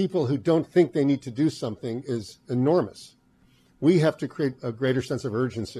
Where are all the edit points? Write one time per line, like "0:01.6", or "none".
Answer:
none